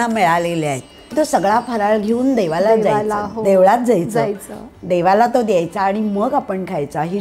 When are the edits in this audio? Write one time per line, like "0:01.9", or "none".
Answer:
0:01.1